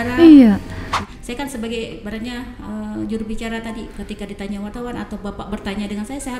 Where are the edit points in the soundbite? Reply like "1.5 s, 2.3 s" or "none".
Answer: 1.0 s